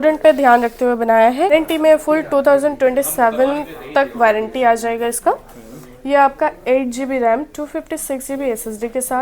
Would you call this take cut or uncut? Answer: cut